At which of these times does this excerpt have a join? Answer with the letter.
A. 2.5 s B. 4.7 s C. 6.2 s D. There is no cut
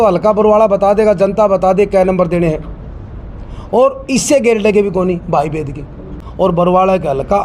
C